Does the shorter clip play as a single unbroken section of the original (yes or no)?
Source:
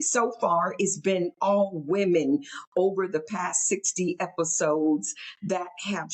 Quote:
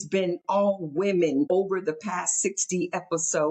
no